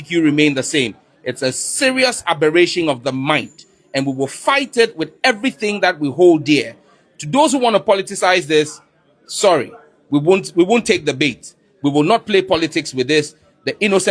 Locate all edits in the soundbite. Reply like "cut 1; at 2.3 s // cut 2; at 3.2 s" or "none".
none